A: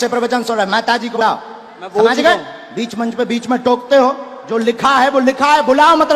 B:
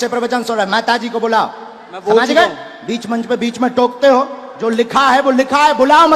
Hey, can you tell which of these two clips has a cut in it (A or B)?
A